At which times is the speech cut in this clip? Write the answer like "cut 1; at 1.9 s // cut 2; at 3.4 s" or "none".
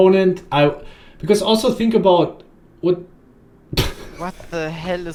none